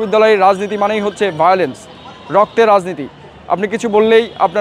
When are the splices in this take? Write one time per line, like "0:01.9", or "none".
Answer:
none